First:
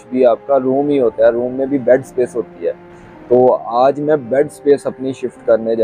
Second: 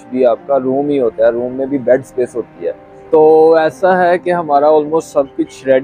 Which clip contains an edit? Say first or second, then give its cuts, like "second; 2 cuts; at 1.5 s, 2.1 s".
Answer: second; 1 cut; at 2.9 s